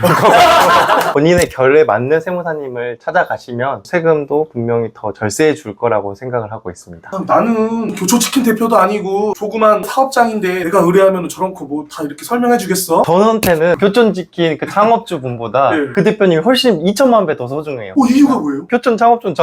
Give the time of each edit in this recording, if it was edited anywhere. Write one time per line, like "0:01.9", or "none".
0:01.1
0:03.8
0:07.1
0:09.9
0:13.1

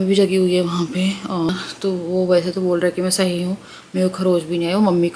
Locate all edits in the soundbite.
0:01.5

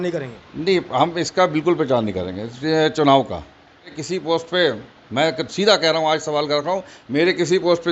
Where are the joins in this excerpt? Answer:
0:04.0

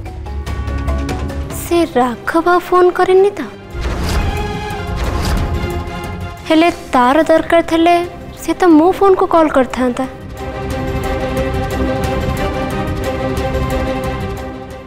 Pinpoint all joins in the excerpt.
0:01.5

